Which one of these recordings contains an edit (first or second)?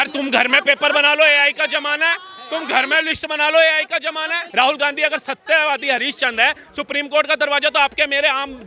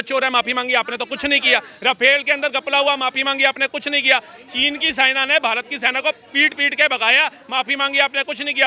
first